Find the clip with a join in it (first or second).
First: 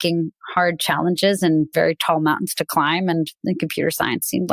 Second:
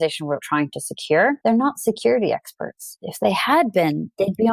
second